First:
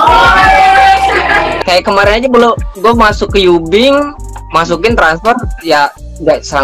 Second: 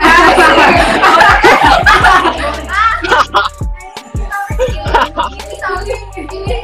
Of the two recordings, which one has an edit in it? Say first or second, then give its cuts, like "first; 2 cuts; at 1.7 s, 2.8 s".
first; 1 cut; at 1.5 s